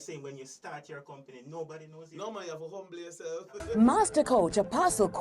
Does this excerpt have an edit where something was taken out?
yes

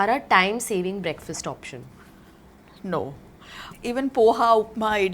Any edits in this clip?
yes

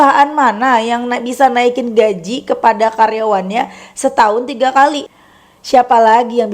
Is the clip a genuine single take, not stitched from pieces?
no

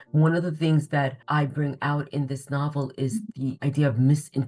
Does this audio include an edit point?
yes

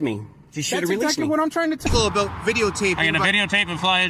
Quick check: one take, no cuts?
no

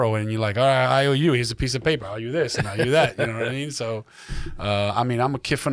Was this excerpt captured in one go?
yes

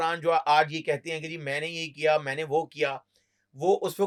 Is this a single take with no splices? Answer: yes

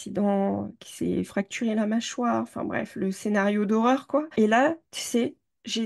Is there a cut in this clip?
no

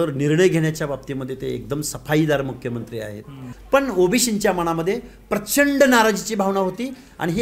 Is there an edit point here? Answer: yes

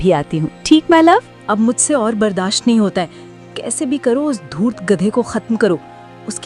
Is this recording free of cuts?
no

